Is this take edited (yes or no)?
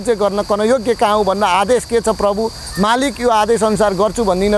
no